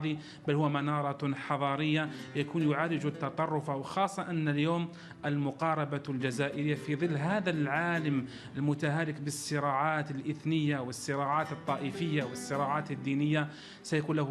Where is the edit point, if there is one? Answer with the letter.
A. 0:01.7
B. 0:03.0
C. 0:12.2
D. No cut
D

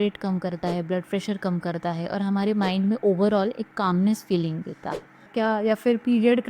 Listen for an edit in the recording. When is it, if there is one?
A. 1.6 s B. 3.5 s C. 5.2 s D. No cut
C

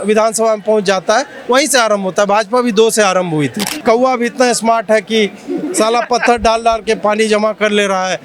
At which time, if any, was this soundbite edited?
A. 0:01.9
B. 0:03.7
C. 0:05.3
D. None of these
B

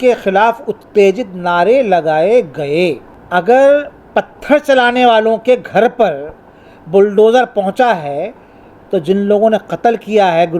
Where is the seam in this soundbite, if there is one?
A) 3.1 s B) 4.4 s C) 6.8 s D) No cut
A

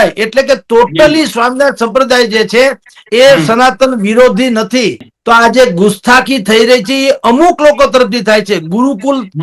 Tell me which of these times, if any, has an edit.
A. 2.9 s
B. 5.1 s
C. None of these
B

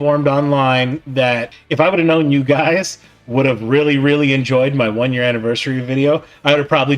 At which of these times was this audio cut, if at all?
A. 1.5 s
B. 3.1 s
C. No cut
A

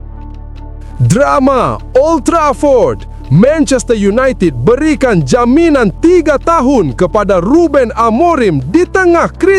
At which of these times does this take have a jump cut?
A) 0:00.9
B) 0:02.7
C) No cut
A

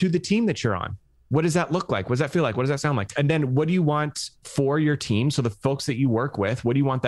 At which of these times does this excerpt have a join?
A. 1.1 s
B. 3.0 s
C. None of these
B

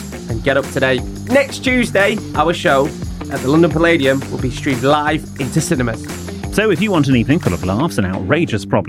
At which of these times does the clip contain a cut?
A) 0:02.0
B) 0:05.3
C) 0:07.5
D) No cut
D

